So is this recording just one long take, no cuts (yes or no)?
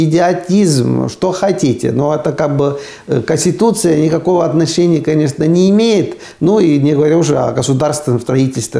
yes